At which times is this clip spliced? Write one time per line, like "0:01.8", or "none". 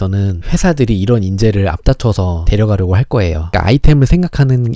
0:03.5